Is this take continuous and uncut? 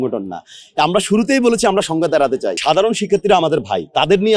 no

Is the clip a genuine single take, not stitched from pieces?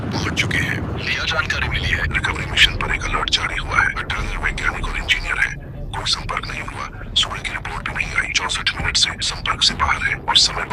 no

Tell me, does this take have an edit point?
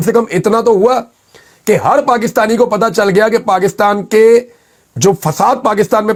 no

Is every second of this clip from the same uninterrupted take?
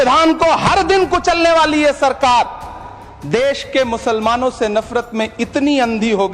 yes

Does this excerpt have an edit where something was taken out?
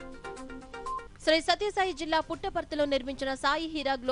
no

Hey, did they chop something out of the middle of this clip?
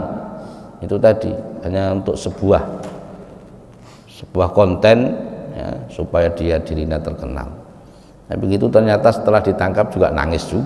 no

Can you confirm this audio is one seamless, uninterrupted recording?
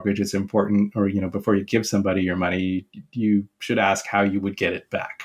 yes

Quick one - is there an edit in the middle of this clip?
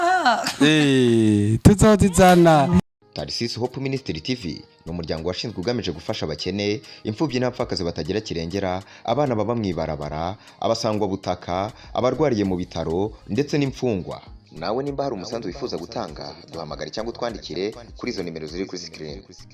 yes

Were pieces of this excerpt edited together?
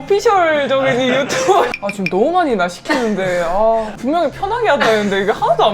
yes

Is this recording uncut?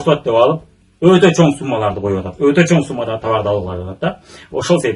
yes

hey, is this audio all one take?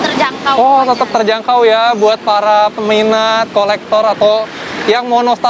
yes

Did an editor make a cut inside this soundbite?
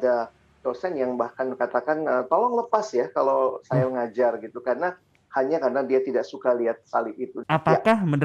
yes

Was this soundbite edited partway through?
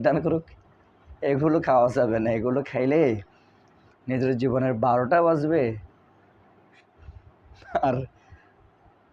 no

